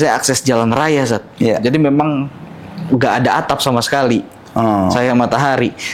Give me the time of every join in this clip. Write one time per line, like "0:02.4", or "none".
none